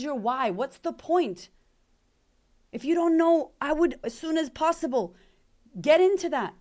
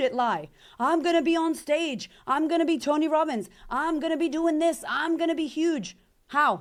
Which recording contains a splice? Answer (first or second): first